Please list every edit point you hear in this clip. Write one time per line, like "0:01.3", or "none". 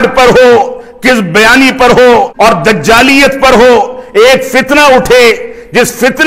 0:02.3